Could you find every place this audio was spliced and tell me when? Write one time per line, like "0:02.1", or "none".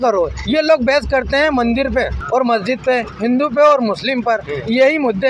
0:02.2